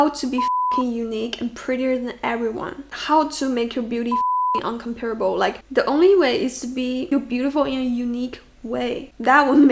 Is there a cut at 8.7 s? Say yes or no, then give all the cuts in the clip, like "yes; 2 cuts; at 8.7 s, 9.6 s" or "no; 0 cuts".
no; 1 cut; at 7.1 s